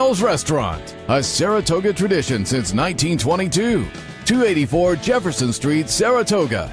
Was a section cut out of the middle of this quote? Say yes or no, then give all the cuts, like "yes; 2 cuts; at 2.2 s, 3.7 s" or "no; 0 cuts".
no; 0 cuts